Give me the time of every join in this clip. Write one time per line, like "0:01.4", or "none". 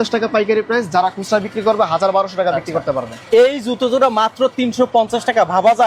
none